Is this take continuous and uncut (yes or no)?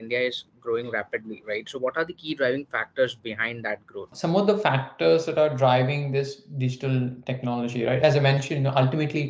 no